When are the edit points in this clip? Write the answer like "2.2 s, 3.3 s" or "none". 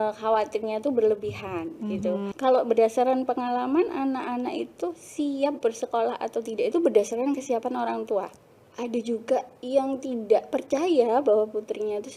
2.3 s, 8.3 s